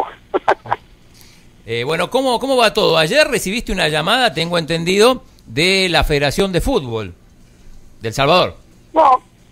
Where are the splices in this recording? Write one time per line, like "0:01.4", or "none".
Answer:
0:08.0